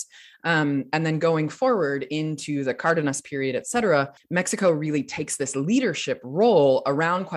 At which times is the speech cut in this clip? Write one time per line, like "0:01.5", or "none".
none